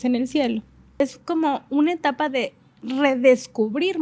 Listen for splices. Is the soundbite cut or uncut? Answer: cut